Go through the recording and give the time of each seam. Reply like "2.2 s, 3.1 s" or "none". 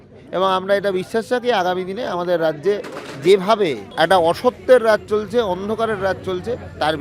3.8 s